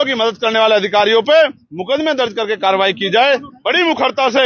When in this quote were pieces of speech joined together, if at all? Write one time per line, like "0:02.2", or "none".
0:03.5